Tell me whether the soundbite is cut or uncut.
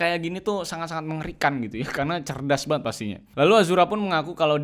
cut